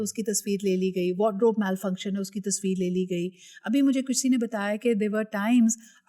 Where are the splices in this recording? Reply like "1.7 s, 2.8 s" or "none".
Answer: none